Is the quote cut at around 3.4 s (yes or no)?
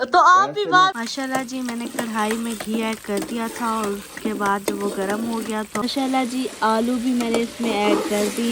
no